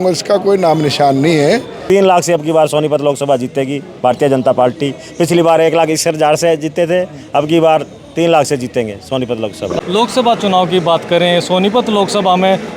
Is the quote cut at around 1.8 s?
yes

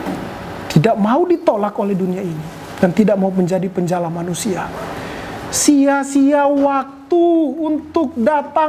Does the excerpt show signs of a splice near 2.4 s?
no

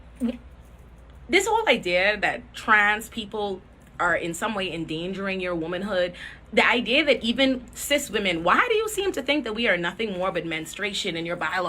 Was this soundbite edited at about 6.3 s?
yes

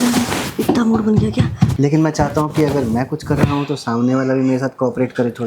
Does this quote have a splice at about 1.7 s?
yes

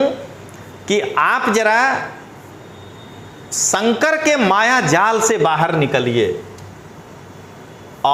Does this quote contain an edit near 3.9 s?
no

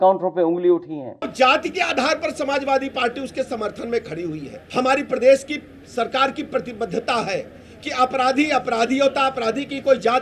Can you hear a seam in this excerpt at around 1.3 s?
yes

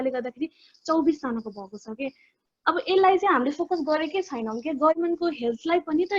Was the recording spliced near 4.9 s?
yes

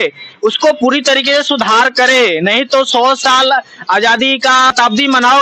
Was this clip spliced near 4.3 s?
no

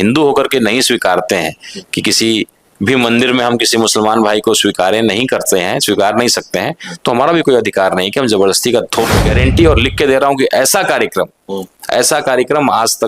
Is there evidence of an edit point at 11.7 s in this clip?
no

